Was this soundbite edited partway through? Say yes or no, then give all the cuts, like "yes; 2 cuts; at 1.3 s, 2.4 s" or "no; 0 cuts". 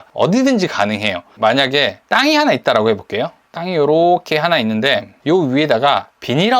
yes; 1 cut; at 1.3 s